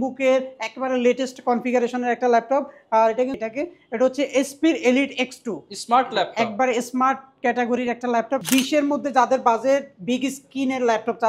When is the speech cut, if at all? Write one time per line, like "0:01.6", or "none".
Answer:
0:03.3
0:08.4